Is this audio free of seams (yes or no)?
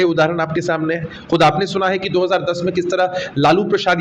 yes